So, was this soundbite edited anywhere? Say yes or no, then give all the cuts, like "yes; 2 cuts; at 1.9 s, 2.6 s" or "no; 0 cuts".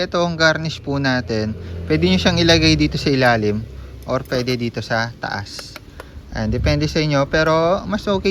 no; 0 cuts